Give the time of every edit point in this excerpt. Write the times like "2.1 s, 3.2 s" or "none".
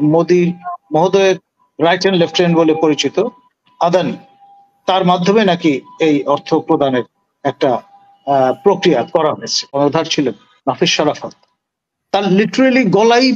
9.7 s